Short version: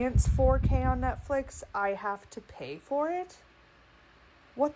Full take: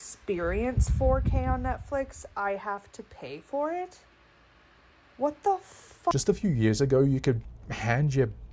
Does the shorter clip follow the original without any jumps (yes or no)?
yes